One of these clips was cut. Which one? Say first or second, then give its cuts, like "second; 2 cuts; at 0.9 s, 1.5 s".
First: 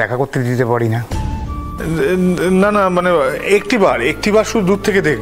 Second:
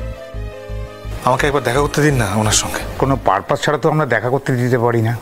second; 1 cut; at 2.8 s